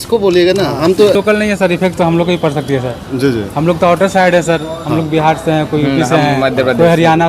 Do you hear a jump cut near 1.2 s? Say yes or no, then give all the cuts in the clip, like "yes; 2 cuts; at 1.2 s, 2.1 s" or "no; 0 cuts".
yes; 1 cut; at 1.2 s